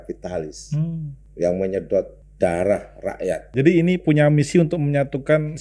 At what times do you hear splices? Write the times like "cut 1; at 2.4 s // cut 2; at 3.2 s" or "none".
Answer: cut 1; at 1.2 s // cut 2; at 2.2 s // cut 3; at 3.4 s

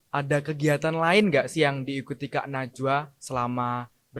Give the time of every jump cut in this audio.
none

